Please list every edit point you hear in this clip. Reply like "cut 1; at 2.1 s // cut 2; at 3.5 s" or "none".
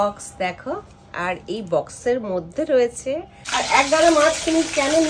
cut 1; at 3.4 s